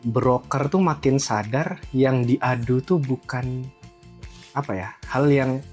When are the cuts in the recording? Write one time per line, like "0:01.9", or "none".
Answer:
none